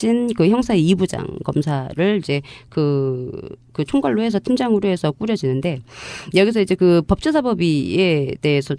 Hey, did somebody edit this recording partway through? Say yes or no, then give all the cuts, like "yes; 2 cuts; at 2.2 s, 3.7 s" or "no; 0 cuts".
no; 0 cuts